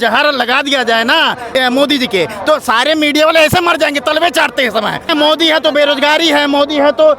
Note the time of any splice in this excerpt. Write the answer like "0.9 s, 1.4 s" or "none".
1.4 s, 5.1 s